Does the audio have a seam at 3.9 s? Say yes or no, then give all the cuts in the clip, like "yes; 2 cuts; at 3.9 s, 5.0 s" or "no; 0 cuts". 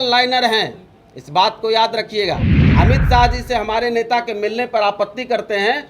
no; 1 cut; at 2.6 s